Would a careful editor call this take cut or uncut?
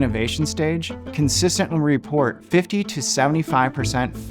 cut